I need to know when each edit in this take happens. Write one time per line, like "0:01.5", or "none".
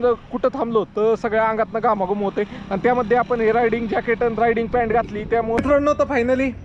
0:05.6